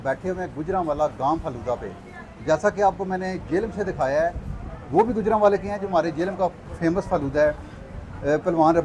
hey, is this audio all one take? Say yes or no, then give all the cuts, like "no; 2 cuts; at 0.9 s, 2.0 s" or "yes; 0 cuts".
yes; 0 cuts